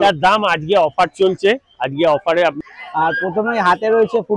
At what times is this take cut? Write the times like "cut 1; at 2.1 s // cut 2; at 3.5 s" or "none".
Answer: cut 1; at 2.6 s